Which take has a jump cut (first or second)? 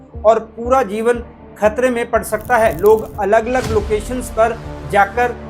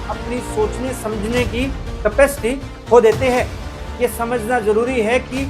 second